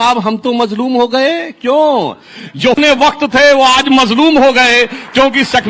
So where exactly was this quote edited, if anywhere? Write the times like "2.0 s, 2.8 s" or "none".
2.8 s